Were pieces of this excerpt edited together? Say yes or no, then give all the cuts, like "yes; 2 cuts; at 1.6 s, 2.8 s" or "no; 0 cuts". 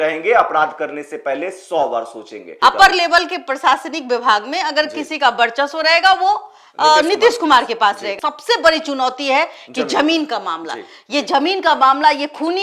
yes; 2 cuts; at 2.5 s, 8.1 s